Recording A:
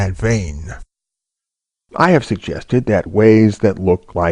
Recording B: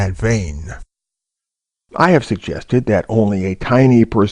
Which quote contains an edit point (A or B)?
B